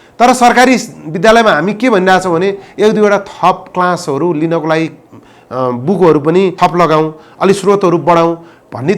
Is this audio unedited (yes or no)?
no